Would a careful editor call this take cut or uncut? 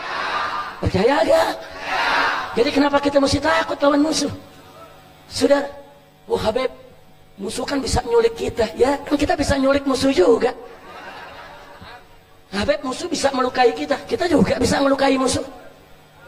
uncut